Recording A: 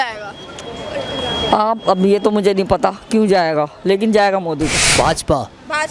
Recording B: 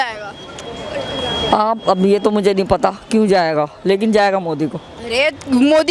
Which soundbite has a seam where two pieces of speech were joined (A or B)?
A